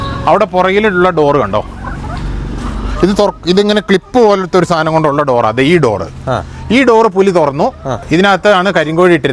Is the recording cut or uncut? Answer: cut